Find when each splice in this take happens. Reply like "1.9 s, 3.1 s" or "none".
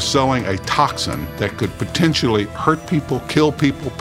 1.3 s